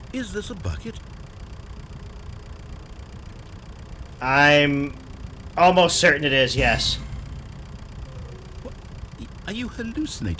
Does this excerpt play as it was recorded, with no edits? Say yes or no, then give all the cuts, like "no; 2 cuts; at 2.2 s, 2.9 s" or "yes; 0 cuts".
yes; 0 cuts